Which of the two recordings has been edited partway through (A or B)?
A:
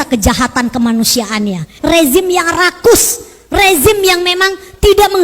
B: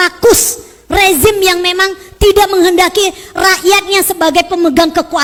A